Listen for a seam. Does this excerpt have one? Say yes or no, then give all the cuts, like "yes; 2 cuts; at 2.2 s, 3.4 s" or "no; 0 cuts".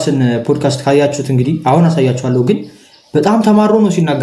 no; 0 cuts